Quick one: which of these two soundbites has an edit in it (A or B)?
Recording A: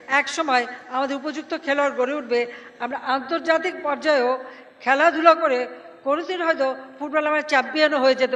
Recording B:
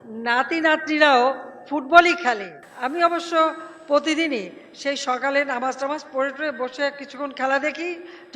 B